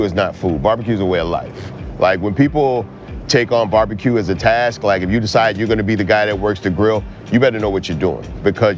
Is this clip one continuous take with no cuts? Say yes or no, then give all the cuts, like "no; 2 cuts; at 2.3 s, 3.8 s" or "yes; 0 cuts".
yes; 0 cuts